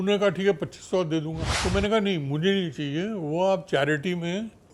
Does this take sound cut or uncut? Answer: cut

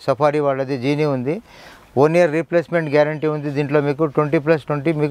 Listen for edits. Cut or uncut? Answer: uncut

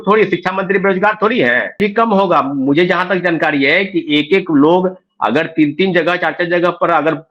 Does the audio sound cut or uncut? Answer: cut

